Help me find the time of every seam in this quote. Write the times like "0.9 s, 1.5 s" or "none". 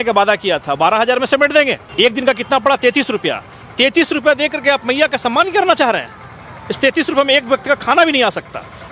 1.8 s